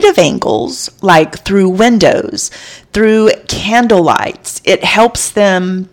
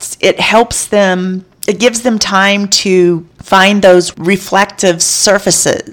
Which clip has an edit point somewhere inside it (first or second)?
second